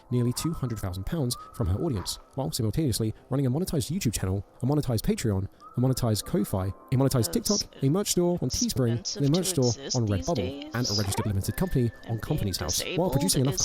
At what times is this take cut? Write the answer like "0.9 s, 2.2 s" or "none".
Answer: none